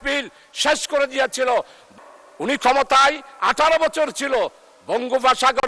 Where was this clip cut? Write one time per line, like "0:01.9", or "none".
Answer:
0:01.9